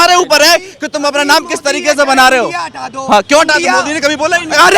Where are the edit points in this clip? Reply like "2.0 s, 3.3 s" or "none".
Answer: none